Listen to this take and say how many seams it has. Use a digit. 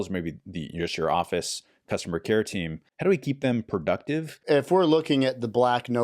2